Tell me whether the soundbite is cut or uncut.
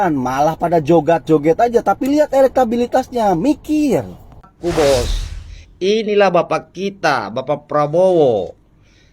cut